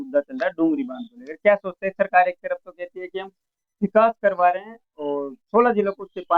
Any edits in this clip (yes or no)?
no